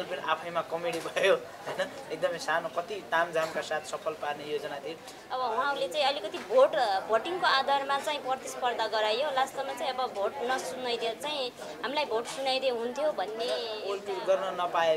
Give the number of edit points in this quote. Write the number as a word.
two